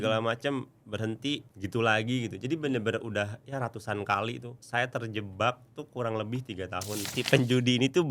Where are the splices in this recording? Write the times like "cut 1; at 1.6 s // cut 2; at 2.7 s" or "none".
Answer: cut 1; at 1.5 s // cut 2; at 4.5 s // cut 3; at 7.1 s